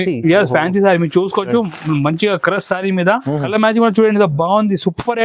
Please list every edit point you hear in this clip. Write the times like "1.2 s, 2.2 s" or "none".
3.4 s